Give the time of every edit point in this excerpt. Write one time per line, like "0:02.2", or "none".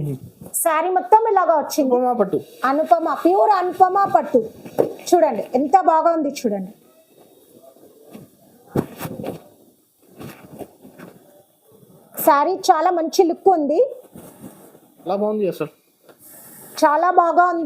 0:01.7
0:15.1